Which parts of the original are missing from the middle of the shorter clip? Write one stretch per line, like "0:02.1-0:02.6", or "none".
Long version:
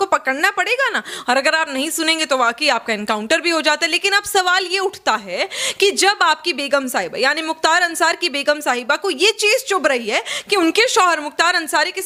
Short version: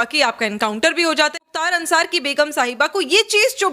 0:04.0-0:07.6